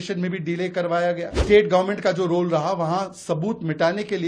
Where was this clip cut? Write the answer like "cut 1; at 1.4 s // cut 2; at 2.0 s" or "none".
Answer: cut 1; at 1.3 s